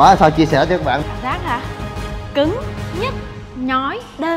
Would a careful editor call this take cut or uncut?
cut